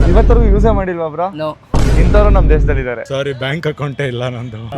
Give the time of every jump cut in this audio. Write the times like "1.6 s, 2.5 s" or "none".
3.1 s